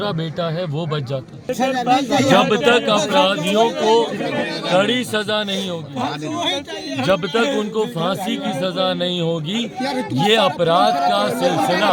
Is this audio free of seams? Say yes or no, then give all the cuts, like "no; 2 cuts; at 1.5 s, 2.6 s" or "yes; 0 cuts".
yes; 0 cuts